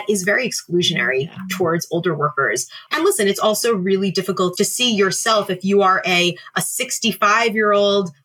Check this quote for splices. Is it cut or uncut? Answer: cut